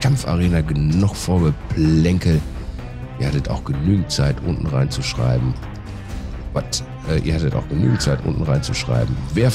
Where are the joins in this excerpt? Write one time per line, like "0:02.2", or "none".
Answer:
none